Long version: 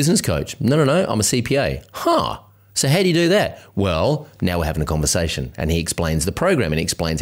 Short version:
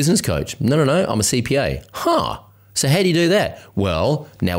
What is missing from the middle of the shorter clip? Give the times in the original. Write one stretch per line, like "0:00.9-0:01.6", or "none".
none